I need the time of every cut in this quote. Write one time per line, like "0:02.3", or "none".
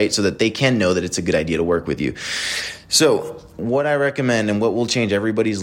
0:03.5